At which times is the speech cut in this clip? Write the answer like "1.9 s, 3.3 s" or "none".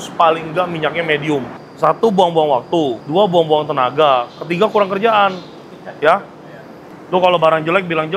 1.6 s, 6.9 s